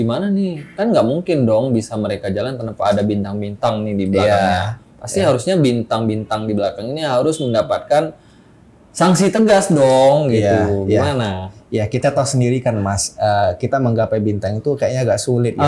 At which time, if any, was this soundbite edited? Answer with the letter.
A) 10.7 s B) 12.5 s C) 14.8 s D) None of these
D